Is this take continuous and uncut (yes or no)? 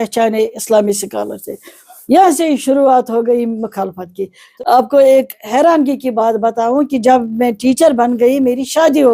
no